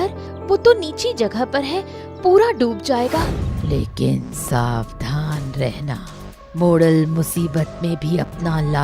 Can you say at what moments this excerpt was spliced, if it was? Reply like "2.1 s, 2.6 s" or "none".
3.4 s